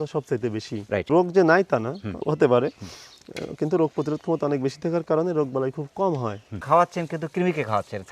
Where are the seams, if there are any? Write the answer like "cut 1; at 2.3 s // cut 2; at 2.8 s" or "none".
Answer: cut 1; at 6.5 s